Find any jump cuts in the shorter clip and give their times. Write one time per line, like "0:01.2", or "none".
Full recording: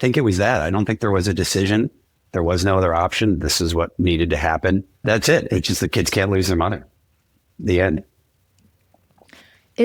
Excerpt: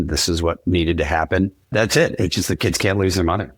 none